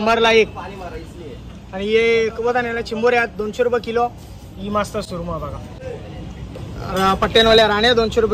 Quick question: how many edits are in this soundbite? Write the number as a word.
zero